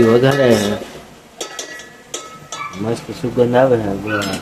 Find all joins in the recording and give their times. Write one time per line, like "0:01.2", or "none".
none